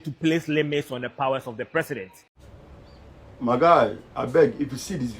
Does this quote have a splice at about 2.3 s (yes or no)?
yes